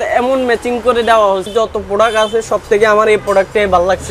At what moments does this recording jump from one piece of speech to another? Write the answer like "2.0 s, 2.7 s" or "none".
1.5 s